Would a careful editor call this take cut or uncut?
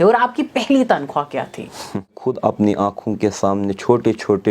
cut